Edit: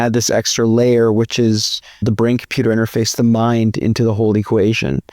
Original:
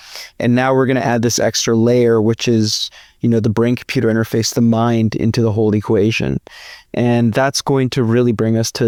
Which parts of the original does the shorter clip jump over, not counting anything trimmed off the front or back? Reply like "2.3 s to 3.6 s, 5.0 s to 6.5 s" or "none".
3.1 s to 3.4 s